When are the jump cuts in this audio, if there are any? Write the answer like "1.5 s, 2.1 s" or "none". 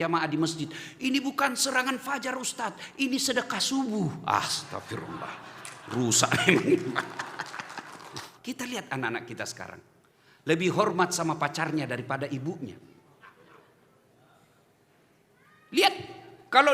8.3 s